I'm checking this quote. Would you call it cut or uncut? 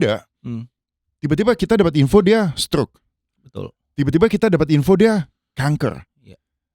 uncut